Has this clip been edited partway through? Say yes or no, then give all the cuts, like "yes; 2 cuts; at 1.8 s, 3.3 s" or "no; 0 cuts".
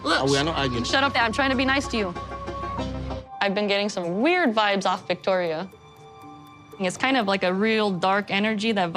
yes; 1 cut; at 3.2 s